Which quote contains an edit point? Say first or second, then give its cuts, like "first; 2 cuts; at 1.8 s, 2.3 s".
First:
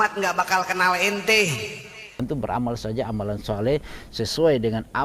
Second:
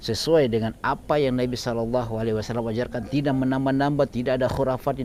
first; 1 cut; at 2.1 s